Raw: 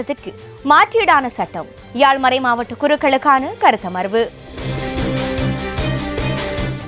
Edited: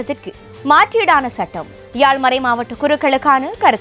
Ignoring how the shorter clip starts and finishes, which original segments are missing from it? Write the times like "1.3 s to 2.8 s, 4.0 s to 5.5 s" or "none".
none